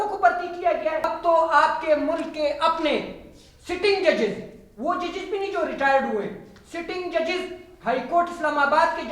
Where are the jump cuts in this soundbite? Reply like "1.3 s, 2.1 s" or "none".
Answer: 1.0 s